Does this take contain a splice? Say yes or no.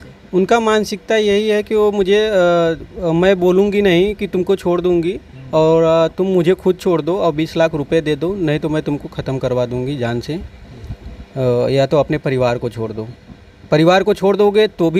no